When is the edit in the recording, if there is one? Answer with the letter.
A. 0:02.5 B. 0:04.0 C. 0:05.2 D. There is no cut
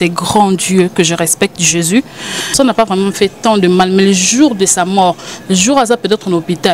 A